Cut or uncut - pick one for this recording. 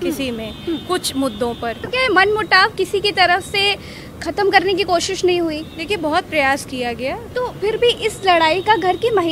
cut